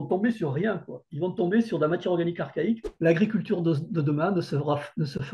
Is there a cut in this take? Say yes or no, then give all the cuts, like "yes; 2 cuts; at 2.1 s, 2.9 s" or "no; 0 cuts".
yes; 1 cut; at 2.9 s